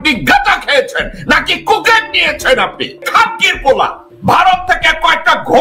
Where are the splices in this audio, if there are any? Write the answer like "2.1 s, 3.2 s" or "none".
3.0 s, 4.1 s